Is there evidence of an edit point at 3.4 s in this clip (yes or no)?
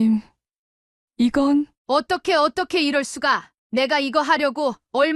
no